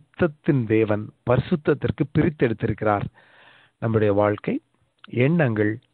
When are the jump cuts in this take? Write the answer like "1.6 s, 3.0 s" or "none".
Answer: none